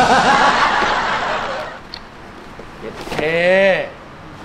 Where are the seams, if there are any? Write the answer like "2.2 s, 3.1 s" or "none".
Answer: none